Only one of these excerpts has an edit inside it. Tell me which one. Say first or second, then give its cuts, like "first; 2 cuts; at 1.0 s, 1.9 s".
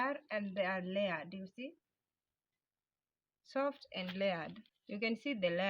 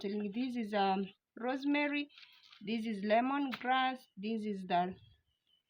first; 1 cut; at 4.5 s